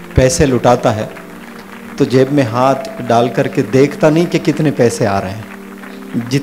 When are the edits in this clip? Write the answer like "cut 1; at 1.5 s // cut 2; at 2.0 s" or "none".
none